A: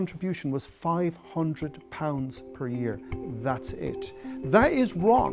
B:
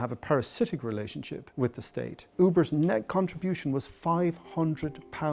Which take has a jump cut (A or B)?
B